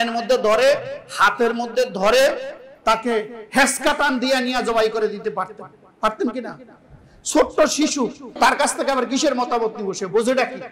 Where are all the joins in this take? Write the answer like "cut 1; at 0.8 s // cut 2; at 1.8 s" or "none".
none